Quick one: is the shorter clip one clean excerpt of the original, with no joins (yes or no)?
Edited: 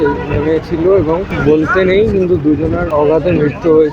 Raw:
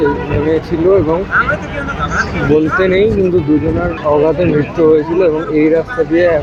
no